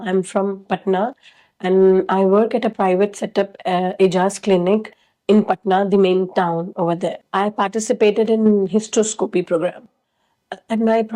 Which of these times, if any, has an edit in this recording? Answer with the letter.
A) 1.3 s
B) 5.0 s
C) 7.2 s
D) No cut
C